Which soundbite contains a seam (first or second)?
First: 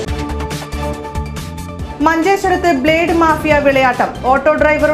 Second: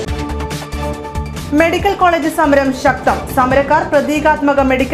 first